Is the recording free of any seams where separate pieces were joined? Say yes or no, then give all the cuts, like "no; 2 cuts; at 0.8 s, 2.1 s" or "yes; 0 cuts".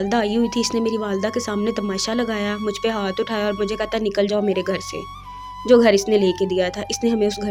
yes; 0 cuts